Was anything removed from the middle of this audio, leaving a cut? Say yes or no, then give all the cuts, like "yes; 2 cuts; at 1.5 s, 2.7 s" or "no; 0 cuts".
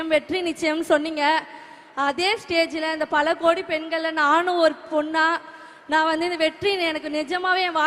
no; 0 cuts